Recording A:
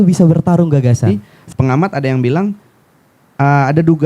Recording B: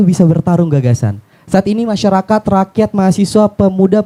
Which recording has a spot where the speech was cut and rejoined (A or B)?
A